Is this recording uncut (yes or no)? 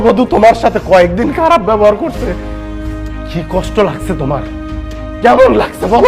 yes